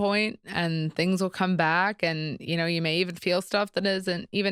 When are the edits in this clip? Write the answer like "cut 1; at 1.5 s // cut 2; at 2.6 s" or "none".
none